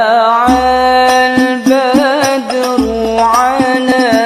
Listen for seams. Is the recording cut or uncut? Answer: uncut